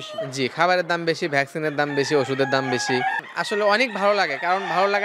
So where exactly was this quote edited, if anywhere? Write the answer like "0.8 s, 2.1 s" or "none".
3.2 s